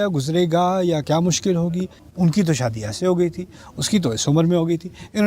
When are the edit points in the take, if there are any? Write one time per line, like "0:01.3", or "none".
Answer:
0:02.0